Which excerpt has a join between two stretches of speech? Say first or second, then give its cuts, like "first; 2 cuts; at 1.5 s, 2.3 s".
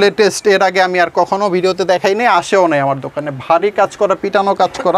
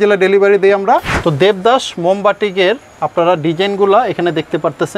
second; 1 cut; at 1.1 s